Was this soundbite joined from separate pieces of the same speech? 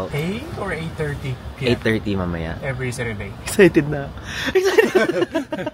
no; 0 cuts

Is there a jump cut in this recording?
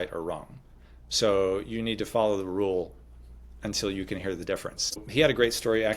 yes; 1 cut; at 5.0 s

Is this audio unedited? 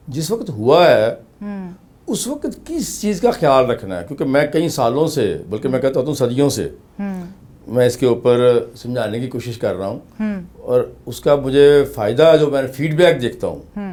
yes; 0 cuts

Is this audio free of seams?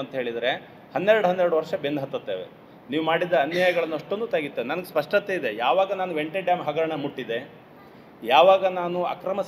yes; 0 cuts

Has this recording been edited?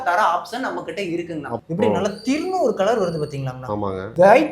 yes; 1 cut; at 1.5 s

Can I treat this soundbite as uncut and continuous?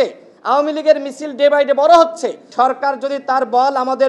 no; 1 cut; at 2.4 s

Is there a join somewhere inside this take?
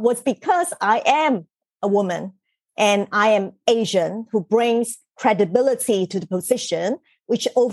no; 0 cuts

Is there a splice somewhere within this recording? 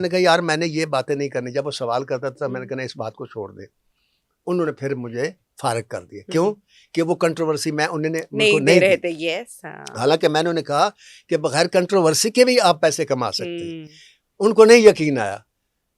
no; 0 cuts

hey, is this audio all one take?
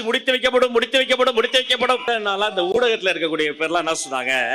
no; 1 cut; at 2.0 s

